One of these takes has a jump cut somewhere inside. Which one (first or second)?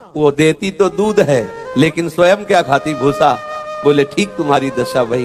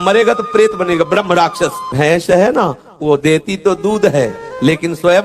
second